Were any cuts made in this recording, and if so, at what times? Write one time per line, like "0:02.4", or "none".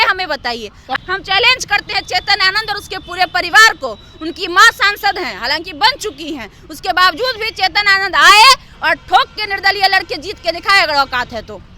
0:01.0